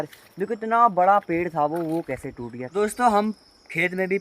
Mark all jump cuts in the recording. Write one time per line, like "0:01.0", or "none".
0:02.5